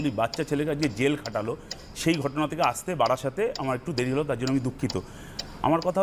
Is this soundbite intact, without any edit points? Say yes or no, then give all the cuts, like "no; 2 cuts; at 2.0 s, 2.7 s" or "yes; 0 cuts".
yes; 0 cuts